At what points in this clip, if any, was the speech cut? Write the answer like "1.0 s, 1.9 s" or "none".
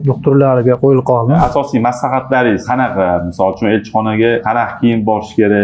1.4 s